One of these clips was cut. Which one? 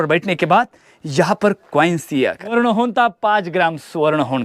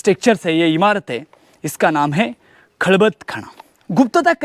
first; 1 cut; at 2.5 s

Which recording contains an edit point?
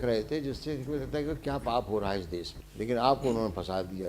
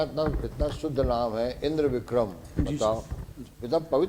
first; 1 cut; at 2.6 s

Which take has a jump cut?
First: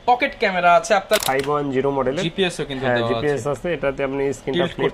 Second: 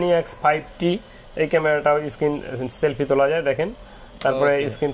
first; 1 cut; at 1.2 s

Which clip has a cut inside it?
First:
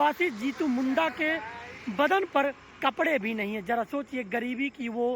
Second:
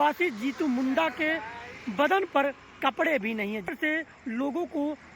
second; 1 cut; at 3.7 s

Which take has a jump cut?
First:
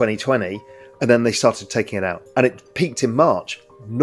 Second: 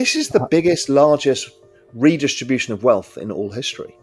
first; 1 cut; at 2.2 s

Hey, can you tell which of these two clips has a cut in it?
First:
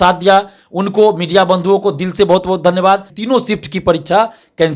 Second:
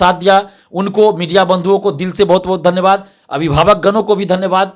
first; 1 cut; at 3.1 s

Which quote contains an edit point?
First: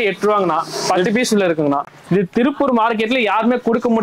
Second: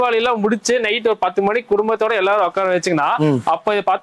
first; 1 cut; at 1.8 s

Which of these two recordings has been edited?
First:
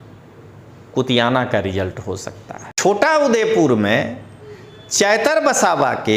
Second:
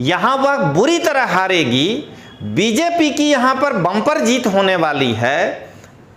first; 1 cut; at 2.7 s

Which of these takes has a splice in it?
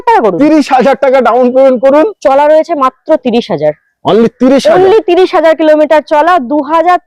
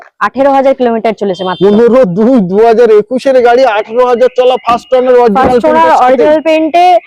first; 1 cut; at 2.2 s

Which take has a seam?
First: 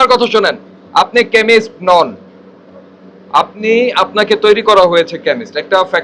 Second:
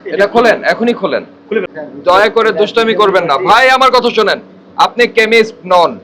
second; 1 cut; at 1.8 s

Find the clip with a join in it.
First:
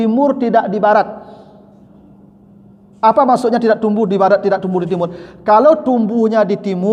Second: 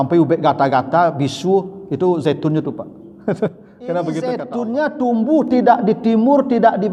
second; 1 cut; at 4.5 s

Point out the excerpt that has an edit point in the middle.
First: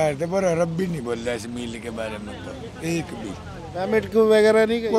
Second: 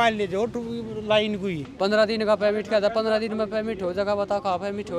second; 1 cut; at 1.7 s

